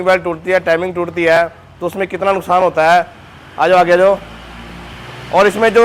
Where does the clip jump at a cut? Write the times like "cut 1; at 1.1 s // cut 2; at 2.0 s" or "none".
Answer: none